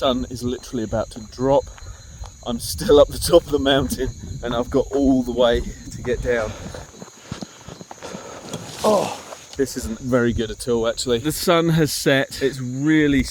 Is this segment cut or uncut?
cut